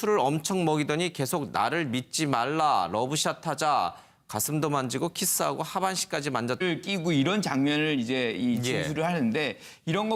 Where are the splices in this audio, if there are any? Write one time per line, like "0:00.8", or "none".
none